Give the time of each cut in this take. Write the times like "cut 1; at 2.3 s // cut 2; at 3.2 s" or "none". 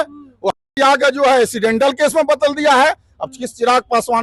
none